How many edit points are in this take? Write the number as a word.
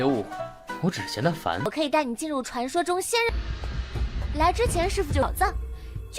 one